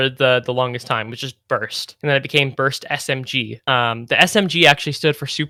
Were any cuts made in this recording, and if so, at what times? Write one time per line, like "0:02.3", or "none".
none